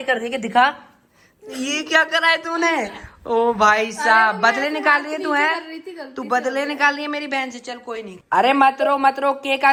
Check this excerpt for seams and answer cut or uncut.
uncut